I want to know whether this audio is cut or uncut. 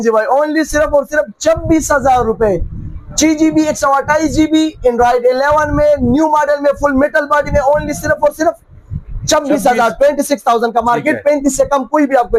uncut